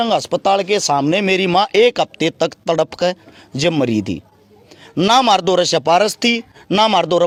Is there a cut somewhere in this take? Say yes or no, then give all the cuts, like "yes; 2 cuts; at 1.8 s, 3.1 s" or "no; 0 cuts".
no; 0 cuts